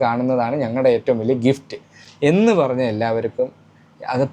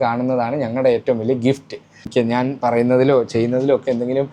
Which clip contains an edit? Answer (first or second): second